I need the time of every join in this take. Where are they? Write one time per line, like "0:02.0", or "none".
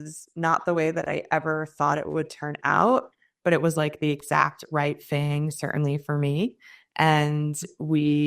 none